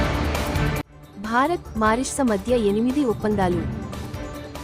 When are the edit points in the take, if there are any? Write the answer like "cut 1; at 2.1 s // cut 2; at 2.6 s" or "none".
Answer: none